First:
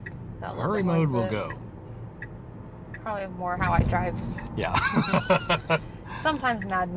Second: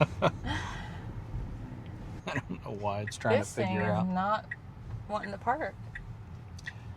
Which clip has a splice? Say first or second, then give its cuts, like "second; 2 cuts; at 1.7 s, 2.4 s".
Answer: second; 1 cut; at 2.1 s